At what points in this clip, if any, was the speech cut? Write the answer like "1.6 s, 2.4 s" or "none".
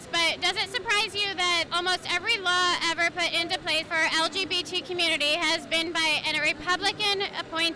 1.7 s, 3.9 s